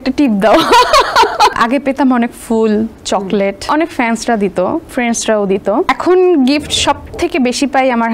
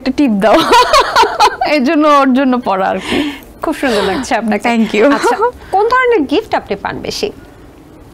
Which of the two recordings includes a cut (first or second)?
first